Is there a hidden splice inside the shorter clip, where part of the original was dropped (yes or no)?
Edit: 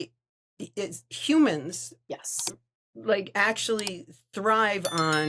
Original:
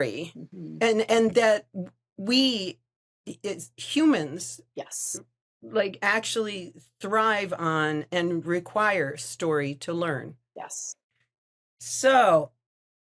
no